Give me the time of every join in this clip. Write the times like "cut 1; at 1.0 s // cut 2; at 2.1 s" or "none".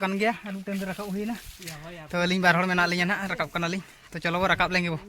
none